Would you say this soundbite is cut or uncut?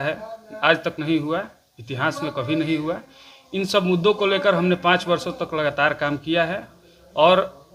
uncut